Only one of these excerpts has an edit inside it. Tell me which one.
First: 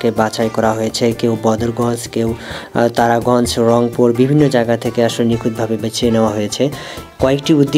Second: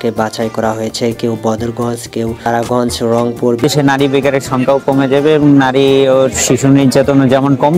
second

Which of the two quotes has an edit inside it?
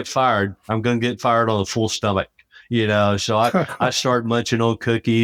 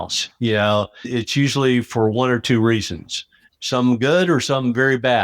second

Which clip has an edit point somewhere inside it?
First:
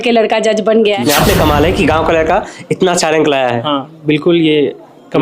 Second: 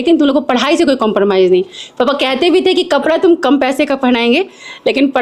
first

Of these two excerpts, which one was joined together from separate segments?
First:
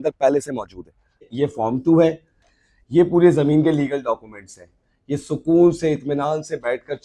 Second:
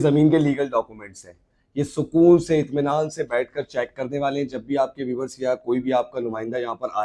first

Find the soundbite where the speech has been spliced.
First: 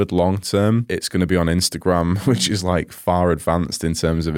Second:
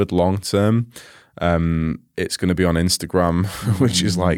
first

